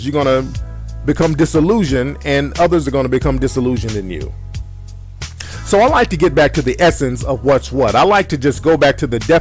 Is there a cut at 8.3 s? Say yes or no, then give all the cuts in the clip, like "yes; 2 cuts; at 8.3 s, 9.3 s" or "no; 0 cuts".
no; 0 cuts